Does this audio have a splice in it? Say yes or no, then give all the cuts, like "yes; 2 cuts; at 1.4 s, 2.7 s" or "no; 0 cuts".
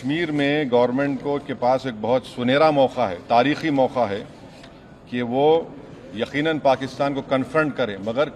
no; 0 cuts